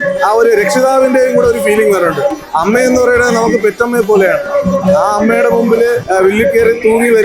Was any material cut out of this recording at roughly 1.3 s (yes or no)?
no